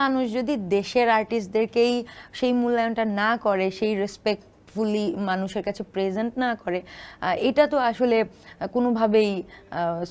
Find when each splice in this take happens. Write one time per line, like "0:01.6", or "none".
none